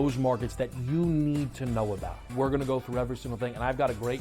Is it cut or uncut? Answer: cut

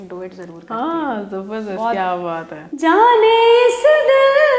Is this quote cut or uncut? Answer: cut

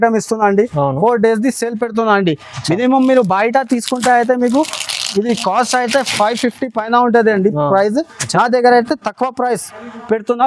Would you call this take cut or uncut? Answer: uncut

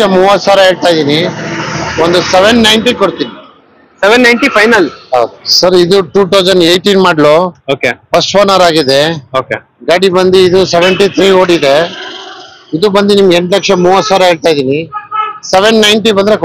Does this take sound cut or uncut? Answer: cut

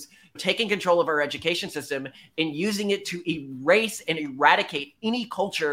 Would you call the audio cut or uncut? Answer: uncut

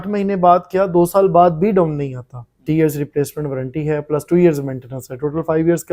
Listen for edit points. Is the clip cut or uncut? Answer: cut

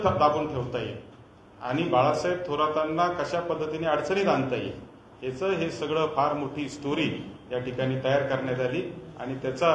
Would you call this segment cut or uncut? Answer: uncut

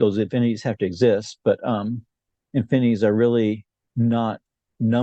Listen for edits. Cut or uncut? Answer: uncut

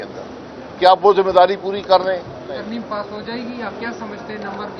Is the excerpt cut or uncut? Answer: cut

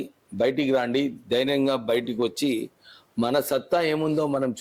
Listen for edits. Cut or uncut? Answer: uncut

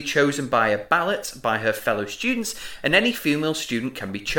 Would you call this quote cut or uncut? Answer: uncut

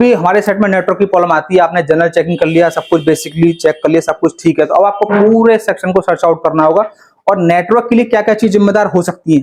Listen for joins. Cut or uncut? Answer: uncut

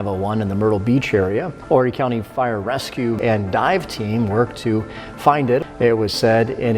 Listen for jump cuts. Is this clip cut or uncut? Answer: cut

